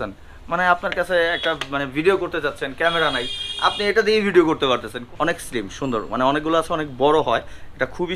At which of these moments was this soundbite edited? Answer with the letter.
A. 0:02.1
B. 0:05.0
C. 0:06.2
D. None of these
B